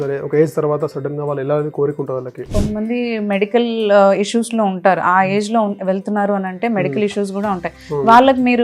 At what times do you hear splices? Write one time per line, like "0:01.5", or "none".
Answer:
0:02.6